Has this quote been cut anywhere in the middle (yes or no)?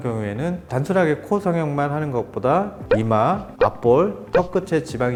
no